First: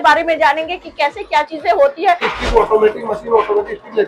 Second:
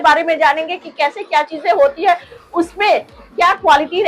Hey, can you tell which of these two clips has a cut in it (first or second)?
first